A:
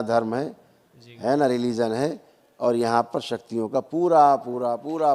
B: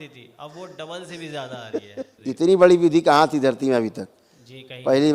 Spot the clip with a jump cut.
B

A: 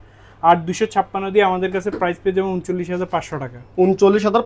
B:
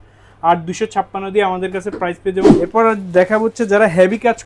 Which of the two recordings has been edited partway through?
B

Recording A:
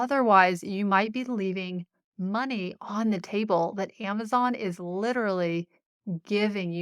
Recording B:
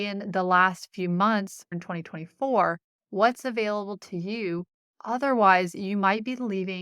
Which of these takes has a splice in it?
B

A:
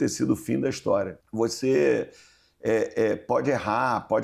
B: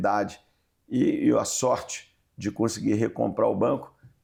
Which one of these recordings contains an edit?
A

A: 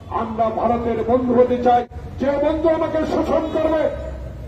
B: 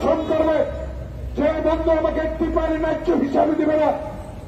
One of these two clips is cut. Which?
A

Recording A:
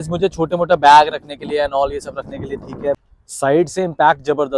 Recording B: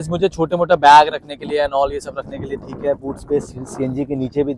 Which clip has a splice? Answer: A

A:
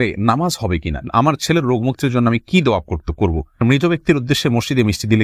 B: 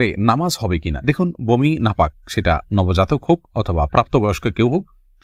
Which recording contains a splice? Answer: A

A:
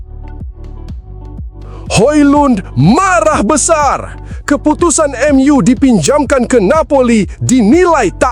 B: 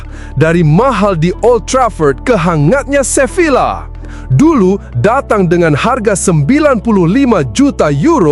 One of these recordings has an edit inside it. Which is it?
A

